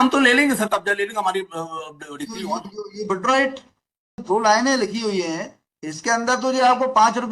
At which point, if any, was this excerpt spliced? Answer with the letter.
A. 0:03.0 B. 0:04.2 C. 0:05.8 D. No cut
B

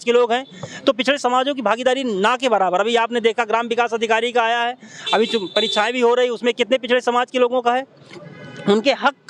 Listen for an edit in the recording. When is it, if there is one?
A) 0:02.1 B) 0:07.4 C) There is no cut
C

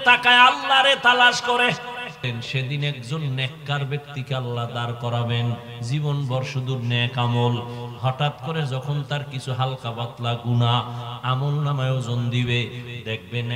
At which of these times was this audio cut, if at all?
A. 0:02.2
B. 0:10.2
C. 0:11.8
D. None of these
A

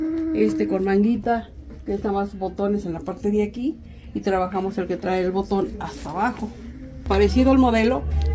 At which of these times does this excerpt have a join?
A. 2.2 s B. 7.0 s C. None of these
B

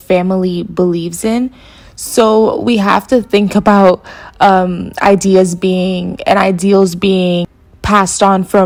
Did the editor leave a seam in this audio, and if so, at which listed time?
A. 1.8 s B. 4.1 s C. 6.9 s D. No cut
D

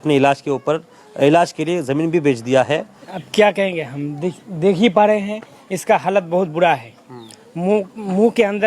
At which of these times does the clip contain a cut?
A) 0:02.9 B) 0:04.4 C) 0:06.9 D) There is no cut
A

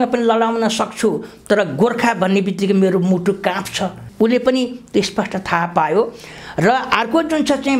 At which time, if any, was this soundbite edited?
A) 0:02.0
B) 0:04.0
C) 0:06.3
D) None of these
B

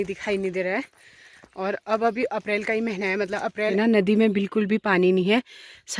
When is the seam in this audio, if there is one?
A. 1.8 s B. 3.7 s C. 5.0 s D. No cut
B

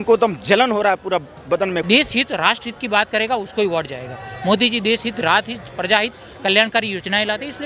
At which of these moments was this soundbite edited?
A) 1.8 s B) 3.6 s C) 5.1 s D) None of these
A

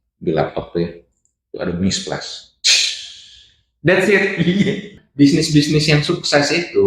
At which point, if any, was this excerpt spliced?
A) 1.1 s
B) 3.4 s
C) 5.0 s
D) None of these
C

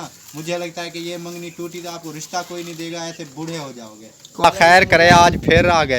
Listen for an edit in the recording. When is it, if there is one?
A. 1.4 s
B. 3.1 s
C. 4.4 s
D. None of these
C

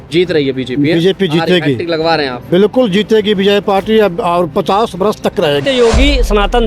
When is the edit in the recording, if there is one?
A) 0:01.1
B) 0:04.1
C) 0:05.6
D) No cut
C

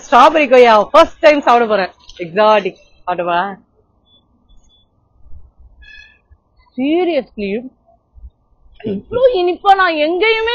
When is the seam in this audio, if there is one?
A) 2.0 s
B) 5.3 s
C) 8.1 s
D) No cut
D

